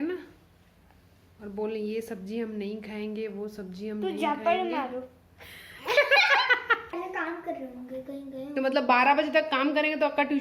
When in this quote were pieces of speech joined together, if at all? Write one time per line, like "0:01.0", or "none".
0:06.9

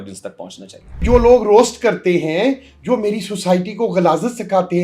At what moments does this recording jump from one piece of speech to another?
0:01.0

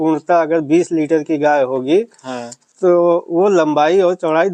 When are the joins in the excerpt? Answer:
none

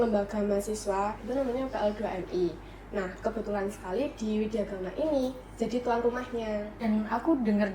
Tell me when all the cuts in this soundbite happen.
0:06.7

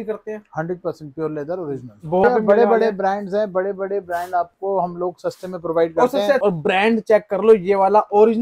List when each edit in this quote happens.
0:02.2
0:06.4

